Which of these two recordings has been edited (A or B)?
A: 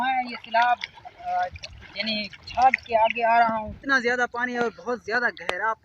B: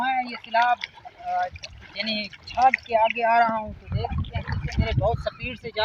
A